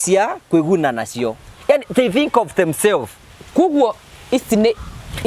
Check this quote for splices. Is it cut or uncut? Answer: uncut